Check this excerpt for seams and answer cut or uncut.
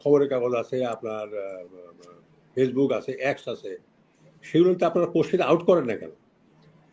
uncut